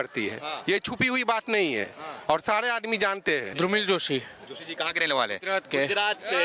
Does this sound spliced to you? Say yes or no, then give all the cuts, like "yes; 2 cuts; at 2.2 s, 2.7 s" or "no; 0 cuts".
yes; 1 cut; at 3.5 s